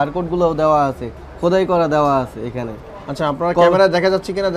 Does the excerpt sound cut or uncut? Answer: uncut